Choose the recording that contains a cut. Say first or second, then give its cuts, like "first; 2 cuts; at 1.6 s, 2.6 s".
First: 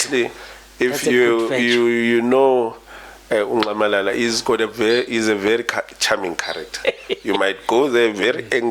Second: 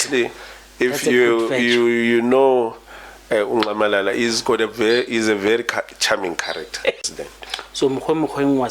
second; 1 cut; at 7.0 s